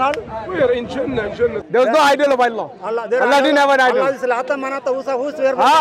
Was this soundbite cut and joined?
yes; 1 cut; at 1.6 s

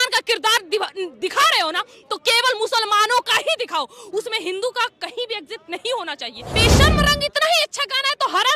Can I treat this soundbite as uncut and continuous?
no; 1 cut; at 6.5 s

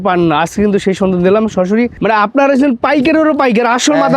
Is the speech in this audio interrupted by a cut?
yes; 1 cut; at 2.0 s

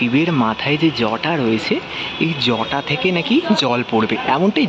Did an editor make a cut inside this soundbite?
no; 0 cuts

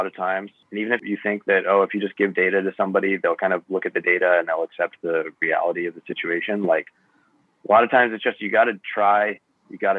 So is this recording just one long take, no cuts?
no; 1 cut; at 1.0 s

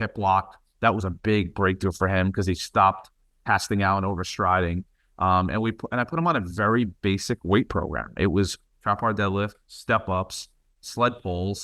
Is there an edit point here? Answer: no; 0 cuts

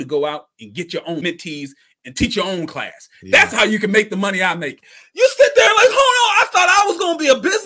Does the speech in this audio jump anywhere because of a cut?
yes; 1 cut; at 1.2 s

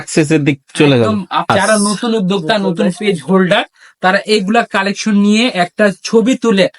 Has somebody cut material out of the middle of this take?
yes; 1 cut; at 1.5 s

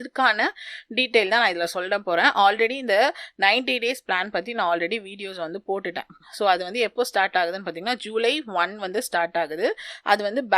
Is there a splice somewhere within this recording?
no; 0 cuts

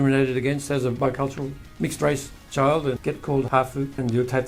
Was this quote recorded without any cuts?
yes; 0 cuts

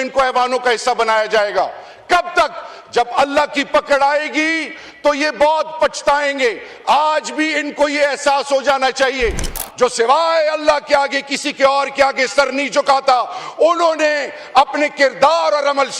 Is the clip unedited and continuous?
no; 1 cut; at 9.6 s

